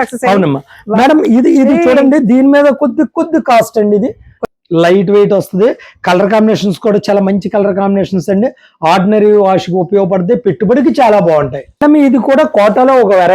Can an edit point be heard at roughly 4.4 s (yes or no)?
yes